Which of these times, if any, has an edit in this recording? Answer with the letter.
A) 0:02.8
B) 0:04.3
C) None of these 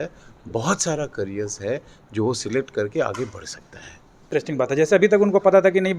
B